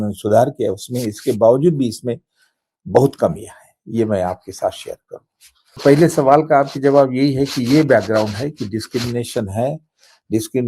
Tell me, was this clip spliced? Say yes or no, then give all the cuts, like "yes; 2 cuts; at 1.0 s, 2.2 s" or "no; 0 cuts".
yes; 1 cut; at 5.8 s